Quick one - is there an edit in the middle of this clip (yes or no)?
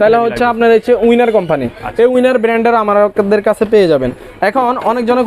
no